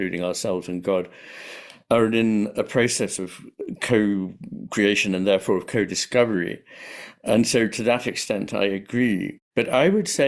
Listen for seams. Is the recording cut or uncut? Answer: cut